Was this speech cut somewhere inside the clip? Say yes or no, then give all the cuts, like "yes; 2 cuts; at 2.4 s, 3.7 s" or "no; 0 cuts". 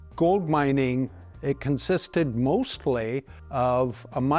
yes; 1 cut; at 1.3 s